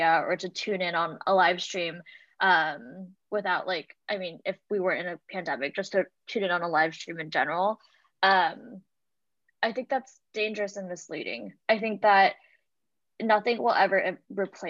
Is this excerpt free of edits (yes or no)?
yes